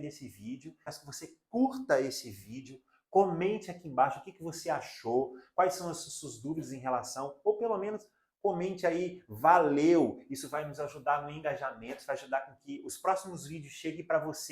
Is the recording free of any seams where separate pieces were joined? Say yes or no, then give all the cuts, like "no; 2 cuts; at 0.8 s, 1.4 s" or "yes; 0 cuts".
no; 1 cut; at 0.9 s